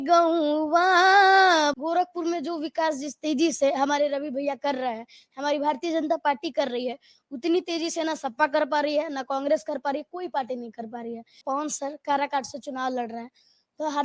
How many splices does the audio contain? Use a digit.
2